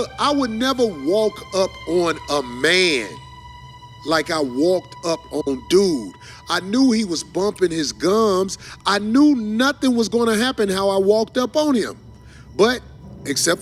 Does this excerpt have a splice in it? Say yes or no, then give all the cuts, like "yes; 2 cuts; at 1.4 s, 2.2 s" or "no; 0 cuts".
no; 0 cuts